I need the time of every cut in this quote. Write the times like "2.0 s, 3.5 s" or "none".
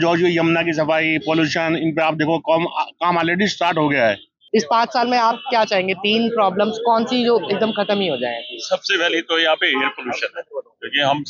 4.3 s